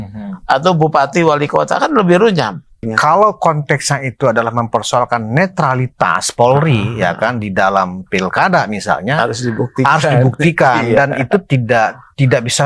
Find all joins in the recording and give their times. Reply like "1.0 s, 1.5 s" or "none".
2.8 s, 6.9 s, 10.8 s

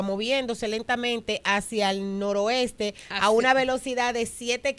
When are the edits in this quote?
none

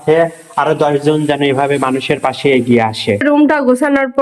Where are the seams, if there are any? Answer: 3.2 s

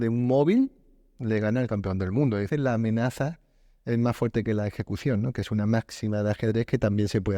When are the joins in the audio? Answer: 2.5 s

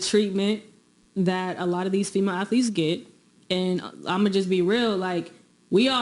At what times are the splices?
1.3 s, 2.3 s

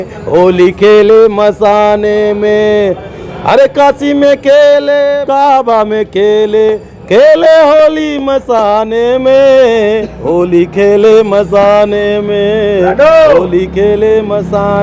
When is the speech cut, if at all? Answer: 5.2 s

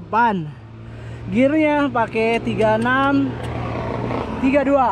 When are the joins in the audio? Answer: none

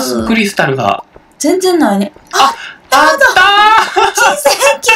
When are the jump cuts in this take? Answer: none

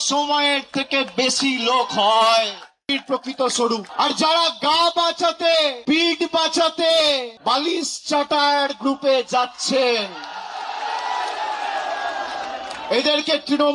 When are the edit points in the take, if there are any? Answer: 2.9 s, 3.9 s, 5.8 s, 7.3 s

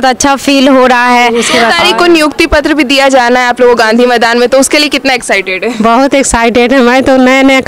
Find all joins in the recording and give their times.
1.5 s

